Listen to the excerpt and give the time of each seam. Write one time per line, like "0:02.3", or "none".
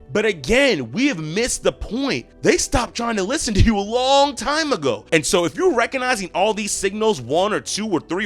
0:05.0